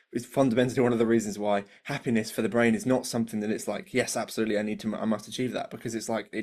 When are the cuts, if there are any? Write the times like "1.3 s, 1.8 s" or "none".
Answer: none